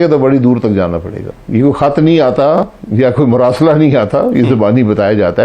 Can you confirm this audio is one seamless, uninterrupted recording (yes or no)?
no